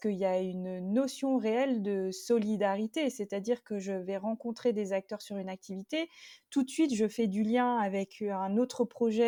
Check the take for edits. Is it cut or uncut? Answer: uncut